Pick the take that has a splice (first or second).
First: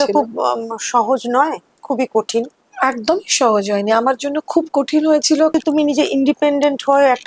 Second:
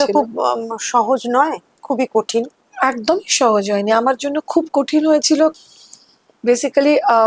first